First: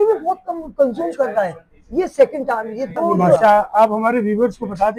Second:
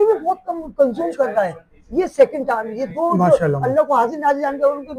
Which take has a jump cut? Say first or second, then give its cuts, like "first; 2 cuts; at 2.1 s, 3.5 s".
first; 1 cut; at 3.4 s